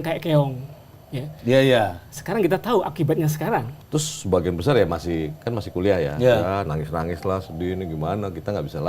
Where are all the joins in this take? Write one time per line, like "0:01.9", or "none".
0:03.7